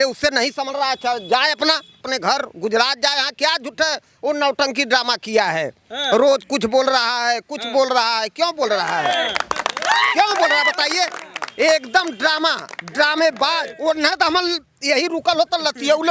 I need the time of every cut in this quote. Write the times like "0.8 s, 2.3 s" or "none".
2.0 s, 13.7 s